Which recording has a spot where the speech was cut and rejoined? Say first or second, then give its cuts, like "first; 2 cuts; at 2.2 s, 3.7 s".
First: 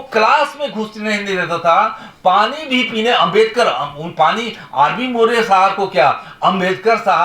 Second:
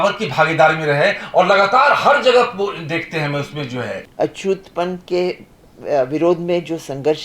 second; 1 cut; at 4.0 s